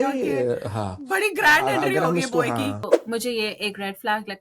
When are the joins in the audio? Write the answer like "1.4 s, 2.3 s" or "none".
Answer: 2.9 s